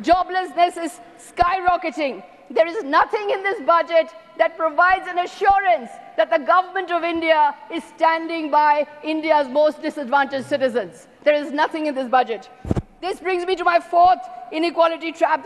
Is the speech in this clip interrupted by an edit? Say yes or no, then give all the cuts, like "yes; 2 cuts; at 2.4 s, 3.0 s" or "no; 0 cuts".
no; 0 cuts